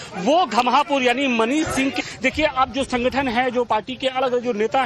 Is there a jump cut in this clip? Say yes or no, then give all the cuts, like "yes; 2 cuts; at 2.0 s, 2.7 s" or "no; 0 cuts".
yes; 1 cut; at 2.1 s